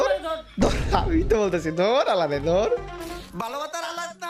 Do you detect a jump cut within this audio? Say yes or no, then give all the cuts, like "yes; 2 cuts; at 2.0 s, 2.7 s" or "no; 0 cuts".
yes; 1 cut; at 3.2 s